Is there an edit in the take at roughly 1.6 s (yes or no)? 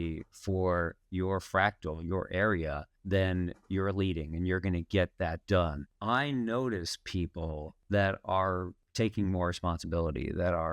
no